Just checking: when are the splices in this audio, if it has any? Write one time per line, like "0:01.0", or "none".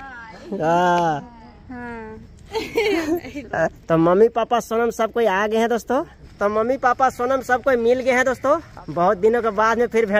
0:01.6
0:03.8
0:06.2
0:08.7